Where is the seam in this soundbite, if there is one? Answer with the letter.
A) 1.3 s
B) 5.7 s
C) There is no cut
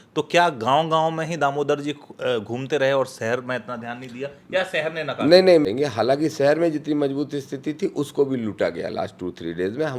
B